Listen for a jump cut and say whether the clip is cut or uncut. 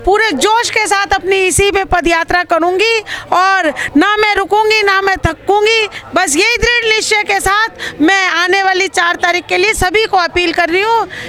uncut